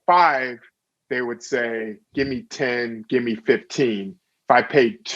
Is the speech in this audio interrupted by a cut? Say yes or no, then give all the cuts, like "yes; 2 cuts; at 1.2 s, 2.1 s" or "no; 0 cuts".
yes; 1 cut; at 2.0 s